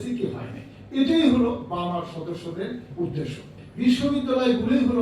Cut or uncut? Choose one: cut